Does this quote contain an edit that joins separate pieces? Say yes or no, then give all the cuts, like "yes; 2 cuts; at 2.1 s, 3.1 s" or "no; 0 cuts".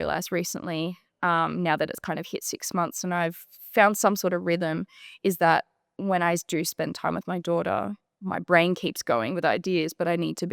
no; 0 cuts